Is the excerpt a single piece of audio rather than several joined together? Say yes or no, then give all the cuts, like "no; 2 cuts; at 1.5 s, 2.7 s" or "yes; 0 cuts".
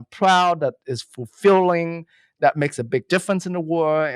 yes; 0 cuts